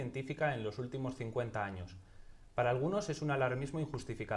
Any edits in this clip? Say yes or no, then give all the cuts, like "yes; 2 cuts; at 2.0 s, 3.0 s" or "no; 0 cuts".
no; 0 cuts